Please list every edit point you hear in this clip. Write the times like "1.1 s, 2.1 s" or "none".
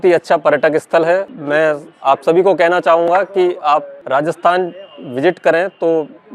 1.3 s, 4.0 s